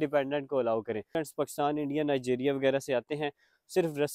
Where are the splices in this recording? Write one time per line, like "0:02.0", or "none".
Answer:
0:01.1